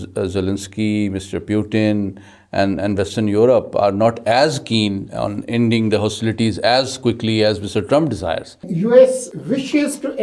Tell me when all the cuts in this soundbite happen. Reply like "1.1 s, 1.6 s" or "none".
8.7 s, 9.3 s